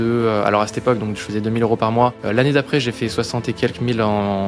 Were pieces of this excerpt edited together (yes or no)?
yes